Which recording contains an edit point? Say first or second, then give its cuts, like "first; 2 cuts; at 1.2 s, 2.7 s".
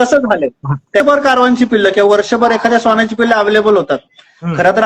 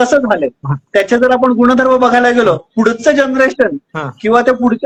first; 1 cut; at 1.0 s